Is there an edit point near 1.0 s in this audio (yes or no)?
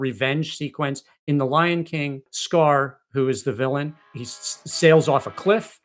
no